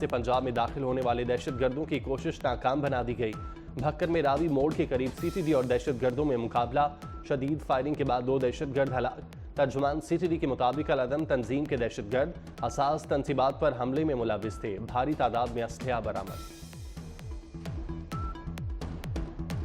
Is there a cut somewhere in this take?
no; 0 cuts

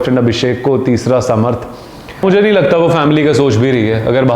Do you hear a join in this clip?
yes; 1 cut; at 2.2 s

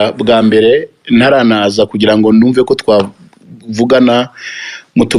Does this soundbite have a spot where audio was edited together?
no; 0 cuts

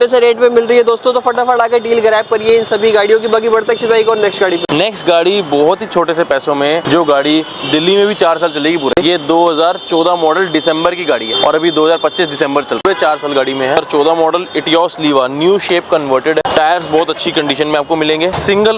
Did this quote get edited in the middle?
no; 0 cuts

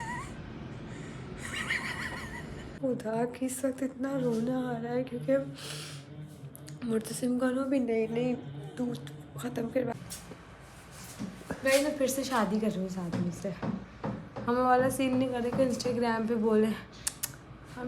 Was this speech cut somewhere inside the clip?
yes; 2 cuts; at 2.7 s, 9.9 s

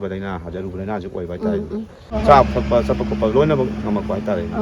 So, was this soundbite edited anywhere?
yes; 1 cut; at 2.2 s

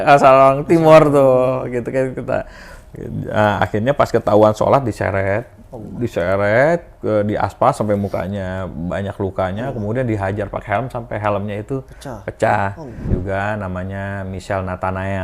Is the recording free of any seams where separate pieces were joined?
no; 1 cut; at 13.0 s

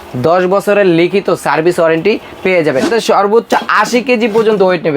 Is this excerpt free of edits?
no; 1 cut; at 2.9 s

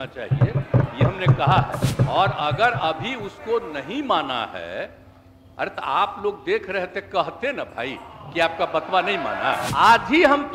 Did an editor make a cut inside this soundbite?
yes; 2 cuts; at 1.9 s, 9.7 s

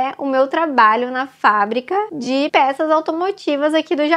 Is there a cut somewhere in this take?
yes; 1 cut; at 2.4 s

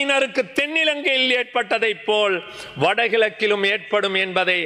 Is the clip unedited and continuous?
yes; 0 cuts

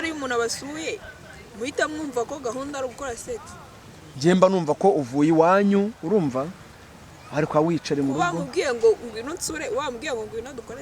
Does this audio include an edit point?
no; 0 cuts

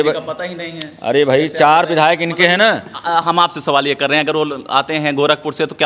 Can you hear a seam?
no; 0 cuts

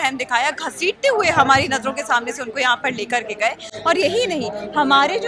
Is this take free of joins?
yes; 0 cuts

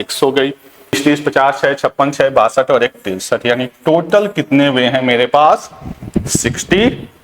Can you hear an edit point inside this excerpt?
yes; 1 cut; at 1.0 s

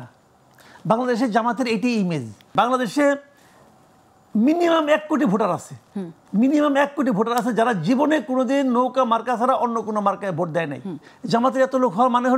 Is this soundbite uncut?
no; 2 cuts; at 2.5 s, 11.1 s

